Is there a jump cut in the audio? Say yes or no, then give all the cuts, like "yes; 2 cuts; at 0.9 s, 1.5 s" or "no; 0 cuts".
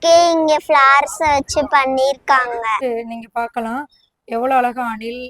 yes; 1 cut; at 2.8 s